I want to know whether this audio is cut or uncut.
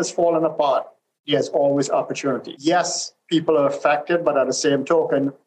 cut